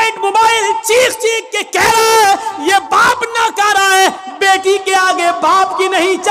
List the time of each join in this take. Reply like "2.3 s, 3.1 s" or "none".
none